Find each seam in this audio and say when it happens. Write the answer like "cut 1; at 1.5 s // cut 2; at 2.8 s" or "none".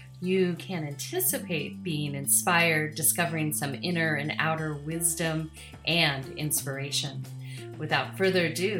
none

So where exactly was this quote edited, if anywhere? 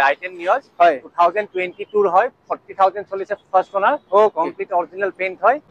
none

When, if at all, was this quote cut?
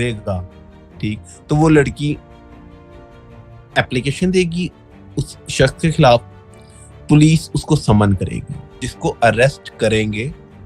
cut 1; at 8.9 s

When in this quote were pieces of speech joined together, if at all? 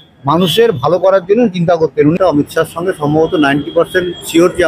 cut 1; at 2.2 s

